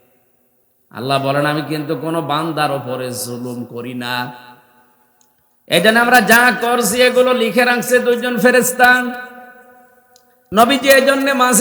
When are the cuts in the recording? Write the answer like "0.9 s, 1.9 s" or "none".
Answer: 10.5 s